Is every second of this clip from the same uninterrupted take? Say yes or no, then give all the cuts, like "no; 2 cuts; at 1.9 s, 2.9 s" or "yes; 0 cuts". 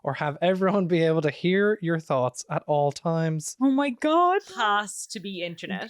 no; 1 cut; at 4.7 s